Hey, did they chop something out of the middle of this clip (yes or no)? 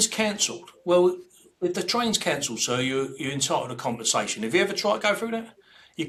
no